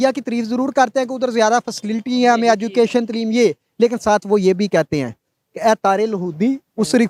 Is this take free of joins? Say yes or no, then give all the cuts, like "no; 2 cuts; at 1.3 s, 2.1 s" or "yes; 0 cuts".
yes; 0 cuts